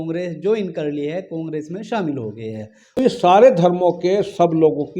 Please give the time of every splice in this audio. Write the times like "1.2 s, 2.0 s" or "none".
3.0 s